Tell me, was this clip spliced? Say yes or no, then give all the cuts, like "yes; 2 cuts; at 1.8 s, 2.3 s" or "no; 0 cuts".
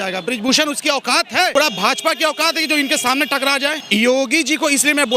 yes; 2 cuts; at 1.5 s, 3.8 s